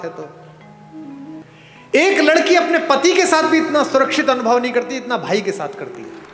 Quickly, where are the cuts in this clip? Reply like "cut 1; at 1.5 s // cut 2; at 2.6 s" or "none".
cut 1; at 1.4 s